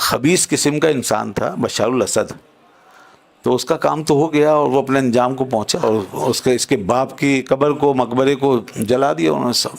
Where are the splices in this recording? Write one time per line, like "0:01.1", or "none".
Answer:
0:05.8